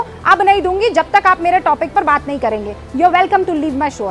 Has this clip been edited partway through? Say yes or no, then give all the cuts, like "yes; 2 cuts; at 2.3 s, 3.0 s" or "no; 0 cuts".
no; 0 cuts